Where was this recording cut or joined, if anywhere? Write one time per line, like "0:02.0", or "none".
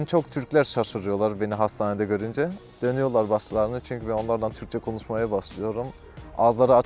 0:02.6